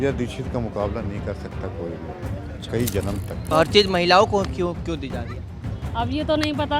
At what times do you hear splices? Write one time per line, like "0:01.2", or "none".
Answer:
0:03.4